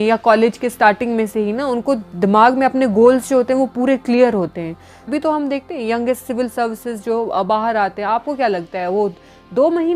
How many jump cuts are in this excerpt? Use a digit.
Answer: 1